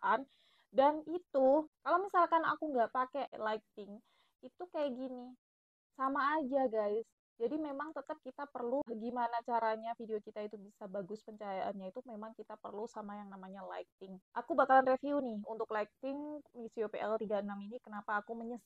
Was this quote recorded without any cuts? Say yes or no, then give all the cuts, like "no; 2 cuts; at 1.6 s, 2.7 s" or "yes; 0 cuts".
yes; 0 cuts